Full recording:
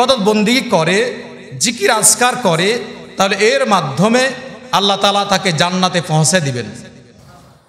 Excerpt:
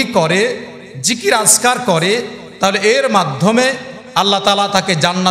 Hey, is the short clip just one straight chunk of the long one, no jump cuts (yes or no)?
yes